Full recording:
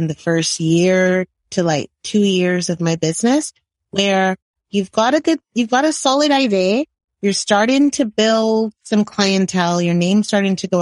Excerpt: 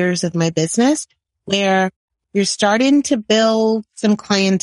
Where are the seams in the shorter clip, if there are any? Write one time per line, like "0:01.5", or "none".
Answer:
0:02.1